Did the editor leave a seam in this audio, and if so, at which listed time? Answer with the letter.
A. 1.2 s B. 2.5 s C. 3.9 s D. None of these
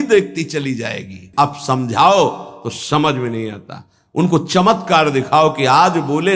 A